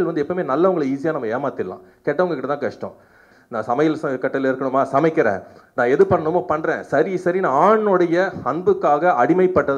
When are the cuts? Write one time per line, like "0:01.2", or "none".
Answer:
0:03.3